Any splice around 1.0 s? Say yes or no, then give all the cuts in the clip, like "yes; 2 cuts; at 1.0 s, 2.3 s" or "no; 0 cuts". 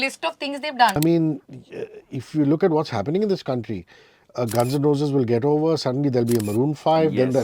yes; 1 cut; at 1.0 s